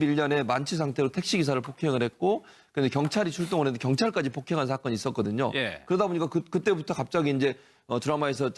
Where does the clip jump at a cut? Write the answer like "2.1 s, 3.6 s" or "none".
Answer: none